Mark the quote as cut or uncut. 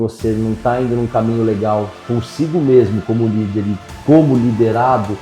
uncut